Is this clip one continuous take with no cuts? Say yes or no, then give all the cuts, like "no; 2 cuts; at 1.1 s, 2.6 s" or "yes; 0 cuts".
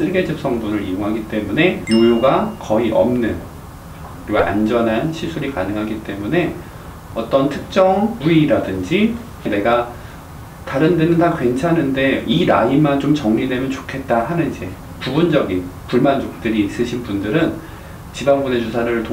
yes; 0 cuts